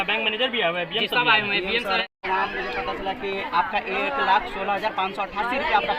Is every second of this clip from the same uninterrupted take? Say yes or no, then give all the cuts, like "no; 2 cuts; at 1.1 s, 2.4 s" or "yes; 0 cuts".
no; 1 cut; at 2.0 s